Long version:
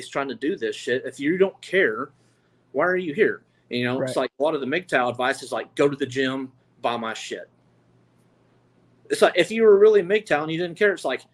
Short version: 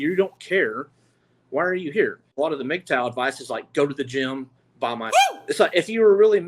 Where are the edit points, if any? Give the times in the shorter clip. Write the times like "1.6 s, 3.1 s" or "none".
2.3 s, 5.2 s